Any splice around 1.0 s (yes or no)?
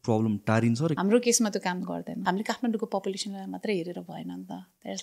yes